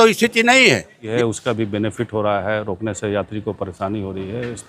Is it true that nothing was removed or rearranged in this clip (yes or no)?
no